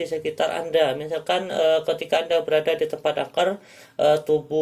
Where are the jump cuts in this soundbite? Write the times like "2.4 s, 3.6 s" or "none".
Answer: none